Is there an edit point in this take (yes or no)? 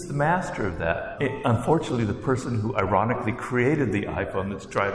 yes